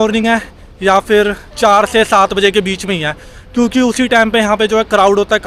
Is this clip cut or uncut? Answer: uncut